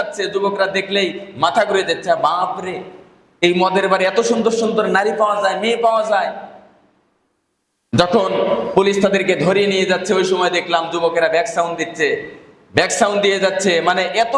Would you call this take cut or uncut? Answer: uncut